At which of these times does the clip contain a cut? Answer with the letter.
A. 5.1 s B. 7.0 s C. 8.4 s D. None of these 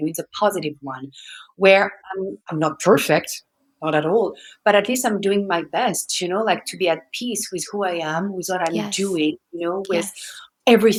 D